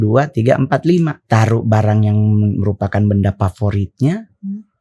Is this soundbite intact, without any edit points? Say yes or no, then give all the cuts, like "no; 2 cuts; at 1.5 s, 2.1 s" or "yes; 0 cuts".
no; 1 cut; at 1.2 s